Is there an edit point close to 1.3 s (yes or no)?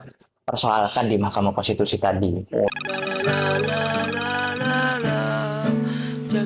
no